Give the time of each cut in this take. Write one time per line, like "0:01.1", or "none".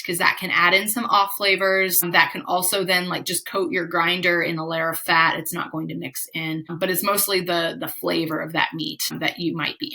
0:02.0
0:06.7
0:09.1